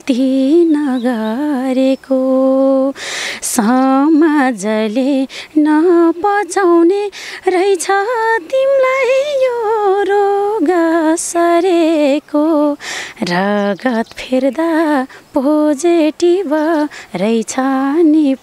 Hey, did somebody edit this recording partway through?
no; 0 cuts

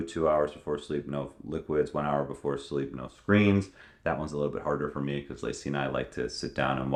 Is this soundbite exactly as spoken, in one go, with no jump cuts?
yes; 0 cuts

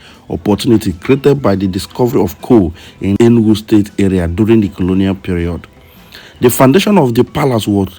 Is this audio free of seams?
no; 1 cut; at 3.1 s

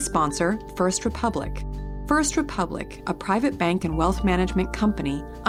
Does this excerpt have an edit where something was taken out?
no; 0 cuts

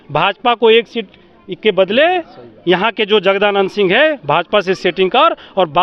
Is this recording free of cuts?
yes; 0 cuts

